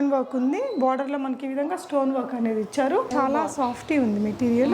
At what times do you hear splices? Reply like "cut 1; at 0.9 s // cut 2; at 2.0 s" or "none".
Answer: cut 1; at 3.1 s